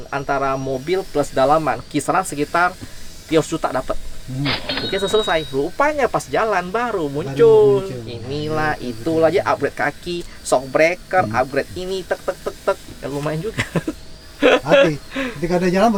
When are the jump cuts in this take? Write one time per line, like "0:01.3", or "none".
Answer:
none

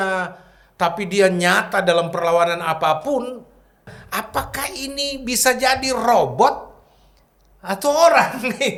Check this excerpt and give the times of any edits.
none

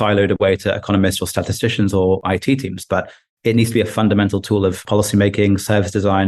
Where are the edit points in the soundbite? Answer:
0:02.2
0:04.8

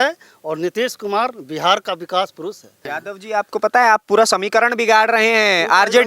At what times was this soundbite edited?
0:02.9

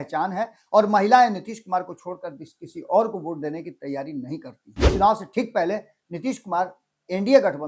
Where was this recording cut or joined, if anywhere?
0:04.8

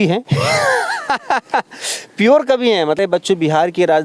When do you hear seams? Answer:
0:03.0

